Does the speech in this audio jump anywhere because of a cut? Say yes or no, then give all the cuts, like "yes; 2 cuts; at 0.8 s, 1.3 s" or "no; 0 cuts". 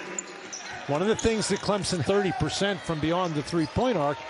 yes; 1 cut; at 2.0 s